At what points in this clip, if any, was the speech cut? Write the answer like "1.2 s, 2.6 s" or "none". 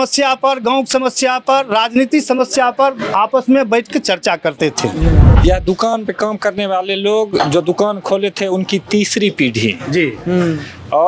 5.3 s